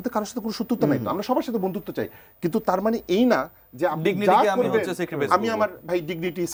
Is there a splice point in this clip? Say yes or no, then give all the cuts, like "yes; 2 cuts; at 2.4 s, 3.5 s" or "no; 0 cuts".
no; 0 cuts